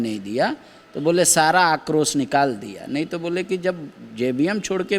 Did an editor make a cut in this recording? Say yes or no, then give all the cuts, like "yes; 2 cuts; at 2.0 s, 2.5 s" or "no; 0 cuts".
no; 0 cuts